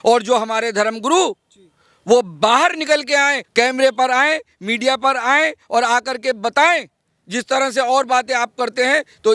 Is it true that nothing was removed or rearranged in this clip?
yes; 0 cuts

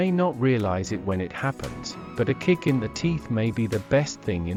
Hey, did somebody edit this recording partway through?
no; 0 cuts

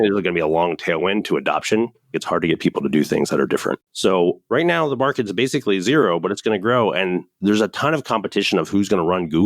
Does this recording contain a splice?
yes; 3 cuts; at 2.2 s, 4.0 s, 7.3 s

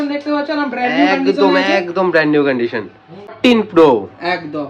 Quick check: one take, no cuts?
no; 1 cut; at 3.4 s

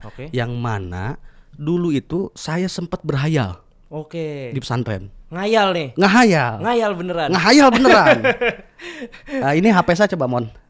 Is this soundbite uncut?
yes; 0 cuts

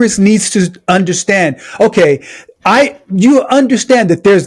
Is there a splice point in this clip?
no; 0 cuts

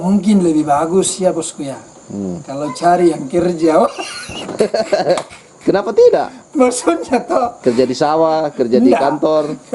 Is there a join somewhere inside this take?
no; 0 cuts

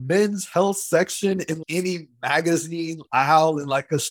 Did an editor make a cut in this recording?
yes; 1 cut; at 1.6 s

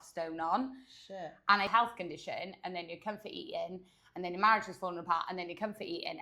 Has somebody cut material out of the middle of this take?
yes; 1 cut; at 1.7 s

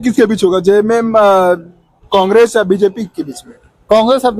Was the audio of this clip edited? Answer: no; 0 cuts

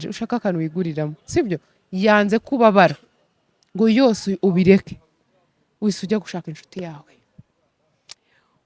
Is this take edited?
no; 0 cuts

